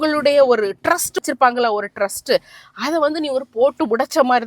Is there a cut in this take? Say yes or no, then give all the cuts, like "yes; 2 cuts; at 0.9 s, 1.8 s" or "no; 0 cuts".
yes; 1 cut; at 1.2 s